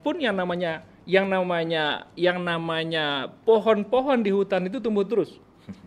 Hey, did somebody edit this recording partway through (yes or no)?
no